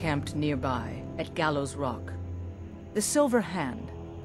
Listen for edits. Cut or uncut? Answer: uncut